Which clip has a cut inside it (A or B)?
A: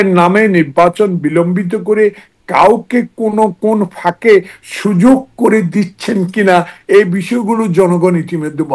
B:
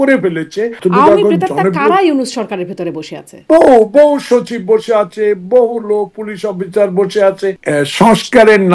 B